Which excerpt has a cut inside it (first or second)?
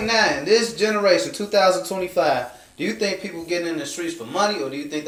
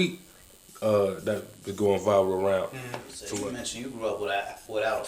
second